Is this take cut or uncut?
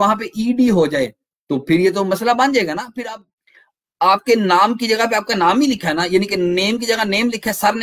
cut